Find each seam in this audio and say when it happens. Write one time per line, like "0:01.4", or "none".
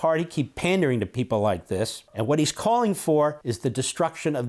0:02.0
0:03.5